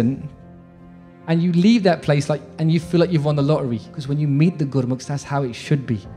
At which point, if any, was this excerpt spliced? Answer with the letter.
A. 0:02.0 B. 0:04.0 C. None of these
B